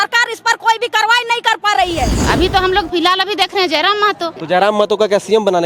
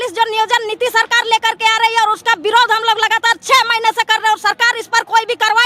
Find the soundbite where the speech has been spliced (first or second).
first